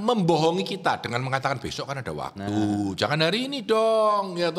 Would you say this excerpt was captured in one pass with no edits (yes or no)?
yes